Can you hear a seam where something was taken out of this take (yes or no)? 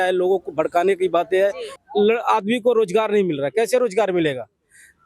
yes